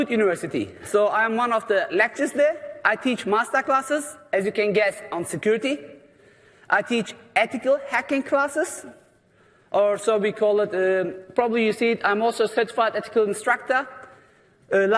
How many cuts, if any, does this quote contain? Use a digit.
0